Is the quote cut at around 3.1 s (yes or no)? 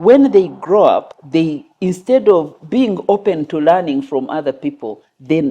no